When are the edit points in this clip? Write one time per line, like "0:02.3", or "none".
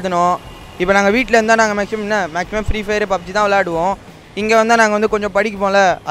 none